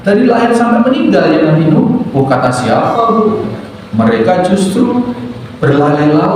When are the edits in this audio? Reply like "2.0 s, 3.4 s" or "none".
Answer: 2.1 s